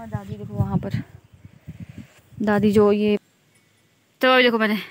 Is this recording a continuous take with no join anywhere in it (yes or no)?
no